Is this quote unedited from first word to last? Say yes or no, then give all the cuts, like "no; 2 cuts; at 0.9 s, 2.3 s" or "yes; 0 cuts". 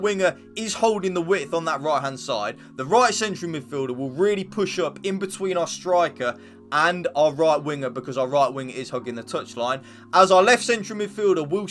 yes; 0 cuts